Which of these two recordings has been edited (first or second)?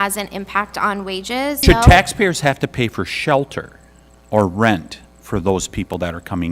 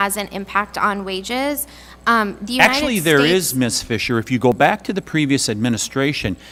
first